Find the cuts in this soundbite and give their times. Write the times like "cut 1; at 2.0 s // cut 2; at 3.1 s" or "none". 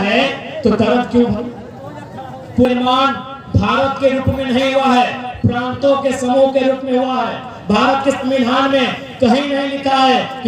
cut 1; at 2.7 s